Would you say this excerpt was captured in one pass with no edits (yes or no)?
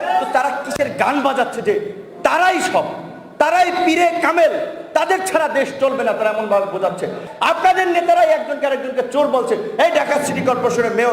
no